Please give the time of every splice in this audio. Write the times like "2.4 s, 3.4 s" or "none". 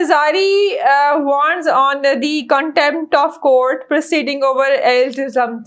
none